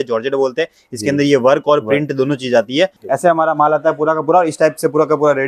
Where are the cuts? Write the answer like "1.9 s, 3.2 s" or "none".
3.0 s